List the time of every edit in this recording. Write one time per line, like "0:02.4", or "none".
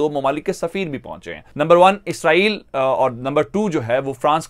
0:01.4

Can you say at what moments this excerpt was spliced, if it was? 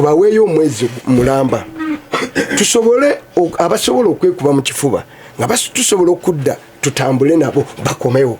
none

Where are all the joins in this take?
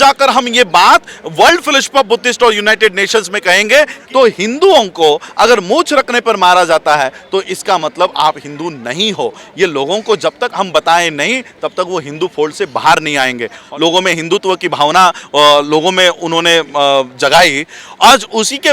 0:04.0
0:13.7

